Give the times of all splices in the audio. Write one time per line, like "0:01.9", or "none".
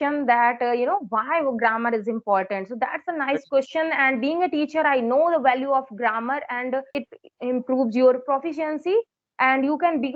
0:07.1

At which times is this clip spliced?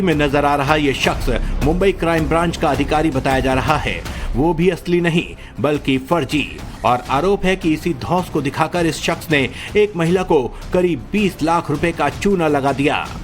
0:12.0

